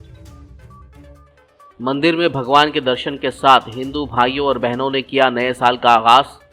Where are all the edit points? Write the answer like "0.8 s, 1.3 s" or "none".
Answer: 1.2 s